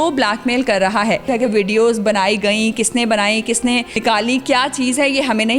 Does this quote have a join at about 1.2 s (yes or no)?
yes